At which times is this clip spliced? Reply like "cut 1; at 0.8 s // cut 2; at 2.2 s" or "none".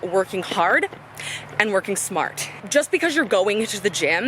cut 1; at 2.6 s